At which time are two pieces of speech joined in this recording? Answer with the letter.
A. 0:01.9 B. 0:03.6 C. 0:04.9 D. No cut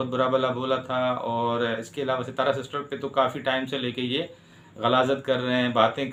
D